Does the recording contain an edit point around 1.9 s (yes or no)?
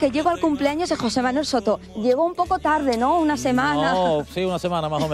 yes